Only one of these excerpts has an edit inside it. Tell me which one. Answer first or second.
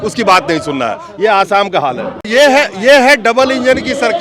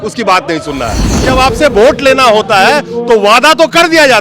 second